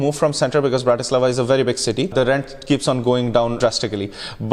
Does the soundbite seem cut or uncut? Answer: cut